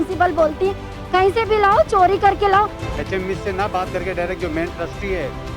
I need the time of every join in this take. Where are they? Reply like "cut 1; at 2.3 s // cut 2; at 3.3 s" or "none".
cut 1; at 2.8 s